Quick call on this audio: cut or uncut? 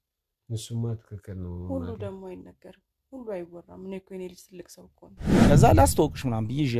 cut